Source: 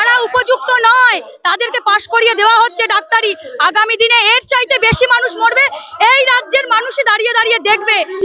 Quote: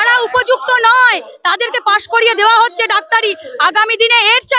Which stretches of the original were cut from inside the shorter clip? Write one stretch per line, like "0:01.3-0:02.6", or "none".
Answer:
none